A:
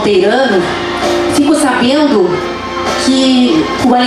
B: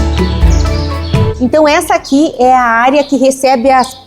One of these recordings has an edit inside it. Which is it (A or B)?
B